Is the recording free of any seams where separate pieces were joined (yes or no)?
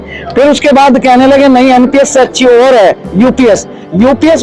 yes